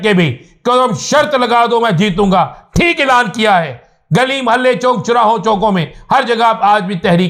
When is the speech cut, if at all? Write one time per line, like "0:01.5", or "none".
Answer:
none